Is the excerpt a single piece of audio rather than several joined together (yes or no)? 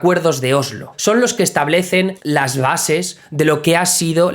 no